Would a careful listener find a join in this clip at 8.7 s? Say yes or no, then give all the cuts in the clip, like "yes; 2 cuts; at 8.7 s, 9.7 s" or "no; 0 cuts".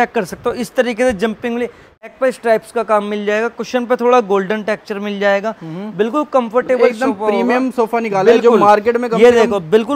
no; 1 cut; at 2.1 s